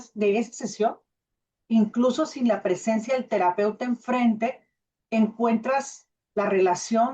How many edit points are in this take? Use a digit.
1